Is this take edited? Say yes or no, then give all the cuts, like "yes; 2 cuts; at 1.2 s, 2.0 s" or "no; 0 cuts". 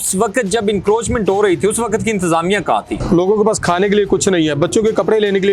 yes; 1 cut; at 2.9 s